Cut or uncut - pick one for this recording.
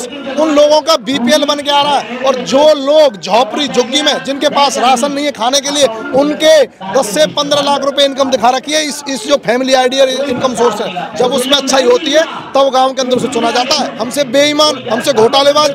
cut